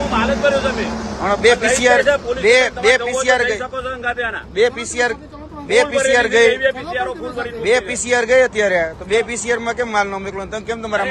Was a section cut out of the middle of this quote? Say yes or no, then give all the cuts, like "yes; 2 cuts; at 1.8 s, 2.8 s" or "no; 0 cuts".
no; 0 cuts